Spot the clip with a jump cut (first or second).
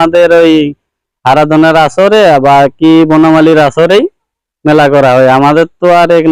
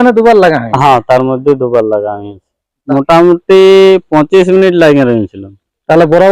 second